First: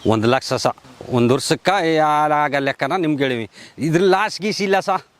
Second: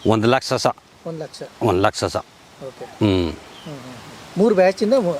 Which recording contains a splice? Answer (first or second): first